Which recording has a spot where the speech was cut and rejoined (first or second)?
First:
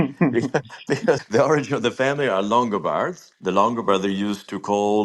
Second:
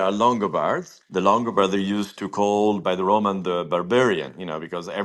first